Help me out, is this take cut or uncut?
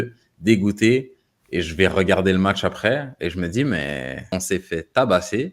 cut